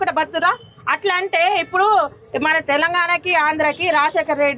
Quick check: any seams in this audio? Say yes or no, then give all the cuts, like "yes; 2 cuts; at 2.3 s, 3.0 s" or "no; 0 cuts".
no; 0 cuts